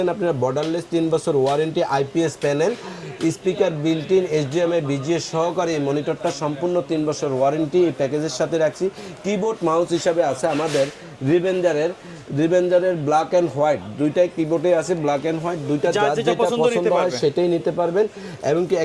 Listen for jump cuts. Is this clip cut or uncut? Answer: uncut